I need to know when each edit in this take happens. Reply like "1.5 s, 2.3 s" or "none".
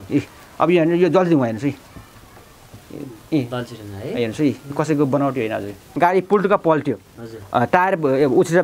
5.8 s